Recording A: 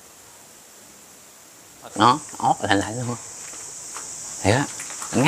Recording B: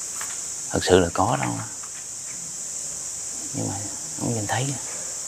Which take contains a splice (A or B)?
A